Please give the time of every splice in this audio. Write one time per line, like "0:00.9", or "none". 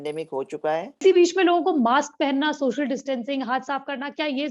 0:01.0